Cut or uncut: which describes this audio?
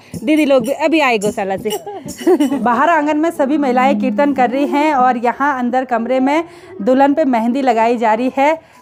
uncut